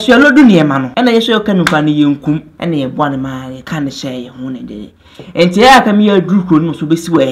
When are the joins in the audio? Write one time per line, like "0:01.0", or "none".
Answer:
0:00.9
0:02.5
0:03.6